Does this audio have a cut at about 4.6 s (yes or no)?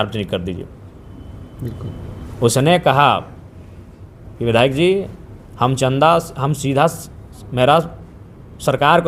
no